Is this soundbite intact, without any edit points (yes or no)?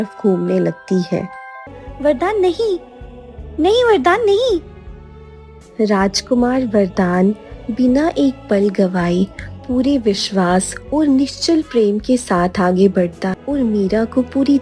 no